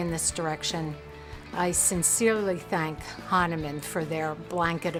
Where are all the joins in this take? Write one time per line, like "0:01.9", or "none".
none